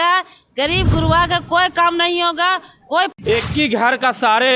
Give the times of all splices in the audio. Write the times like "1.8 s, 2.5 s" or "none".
3.1 s

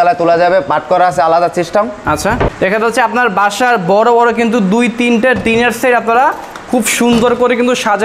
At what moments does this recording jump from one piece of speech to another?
2.5 s

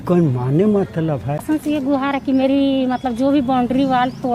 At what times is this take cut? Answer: 1.4 s

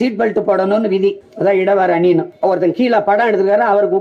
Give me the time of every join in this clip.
1.3 s, 2.3 s

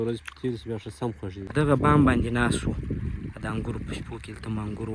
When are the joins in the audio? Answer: 1.4 s

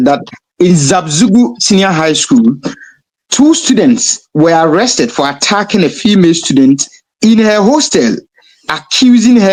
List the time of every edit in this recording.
none

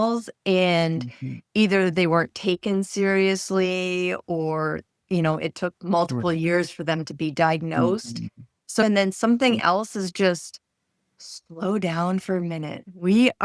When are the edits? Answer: 8.8 s

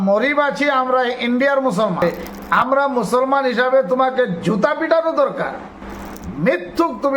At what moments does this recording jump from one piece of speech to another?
2.0 s

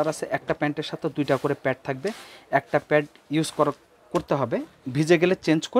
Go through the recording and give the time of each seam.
3.2 s

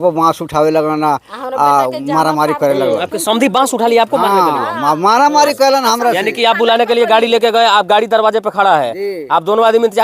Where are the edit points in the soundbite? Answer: none

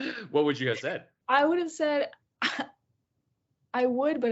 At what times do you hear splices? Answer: 1.1 s

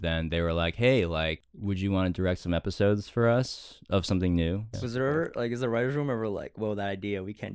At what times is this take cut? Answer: 1.5 s, 4.7 s

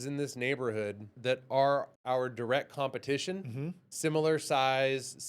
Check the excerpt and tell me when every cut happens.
1.1 s, 1.9 s

